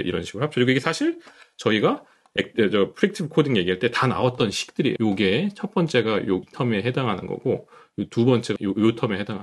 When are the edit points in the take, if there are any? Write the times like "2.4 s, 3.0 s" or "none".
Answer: 5.0 s, 6.5 s, 8.5 s